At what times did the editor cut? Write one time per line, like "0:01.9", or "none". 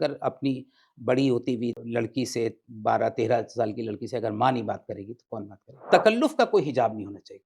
0:01.8
0:05.8